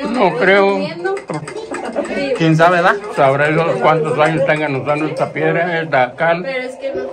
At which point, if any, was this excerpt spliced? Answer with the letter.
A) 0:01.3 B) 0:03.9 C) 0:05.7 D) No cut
D